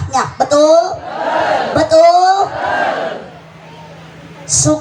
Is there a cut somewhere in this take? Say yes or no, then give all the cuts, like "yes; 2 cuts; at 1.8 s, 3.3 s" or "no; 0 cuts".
no; 0 cuts